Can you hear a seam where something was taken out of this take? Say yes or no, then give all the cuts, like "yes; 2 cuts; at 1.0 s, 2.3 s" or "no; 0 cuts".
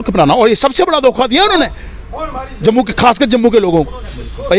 no; 0 cuts